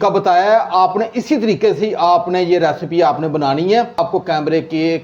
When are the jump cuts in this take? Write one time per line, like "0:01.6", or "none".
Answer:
0:04.0